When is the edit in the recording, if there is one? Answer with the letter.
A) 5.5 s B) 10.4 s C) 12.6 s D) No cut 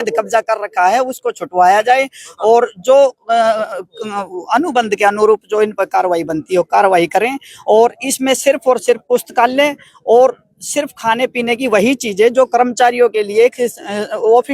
D